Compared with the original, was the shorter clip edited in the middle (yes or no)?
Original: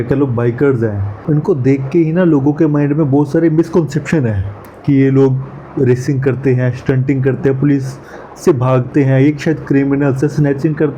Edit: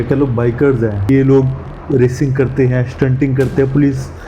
yes